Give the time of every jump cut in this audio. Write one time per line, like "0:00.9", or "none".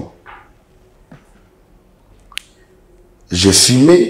none